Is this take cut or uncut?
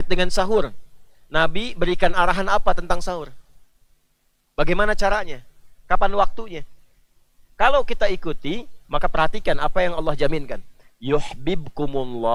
uncut